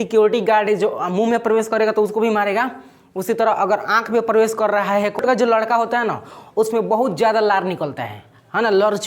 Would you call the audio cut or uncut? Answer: cut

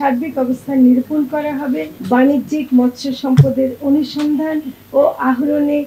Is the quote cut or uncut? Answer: cut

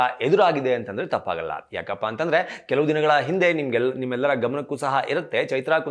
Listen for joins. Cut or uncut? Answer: uncut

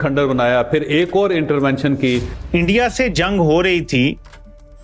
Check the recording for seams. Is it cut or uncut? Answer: cut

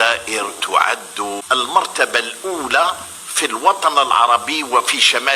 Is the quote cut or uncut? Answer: cut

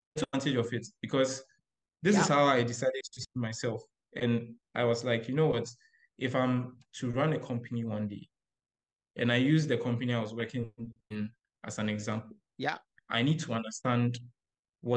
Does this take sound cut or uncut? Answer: uncut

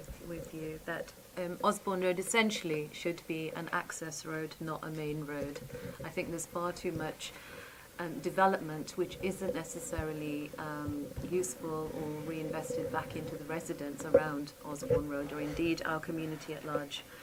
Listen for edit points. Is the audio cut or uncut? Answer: uncut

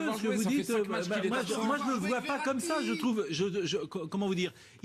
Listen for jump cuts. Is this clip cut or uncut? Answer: uncut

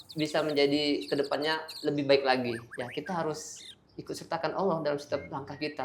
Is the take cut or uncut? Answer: uncut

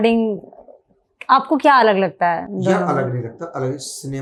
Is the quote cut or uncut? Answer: uncut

